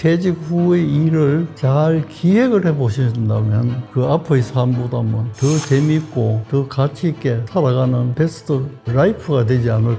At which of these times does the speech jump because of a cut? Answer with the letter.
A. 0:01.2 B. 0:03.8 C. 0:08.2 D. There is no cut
B